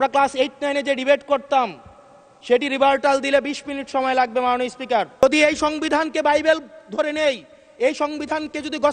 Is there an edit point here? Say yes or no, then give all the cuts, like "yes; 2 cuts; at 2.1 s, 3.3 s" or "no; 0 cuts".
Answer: yes; 1 cut; at 5.2 s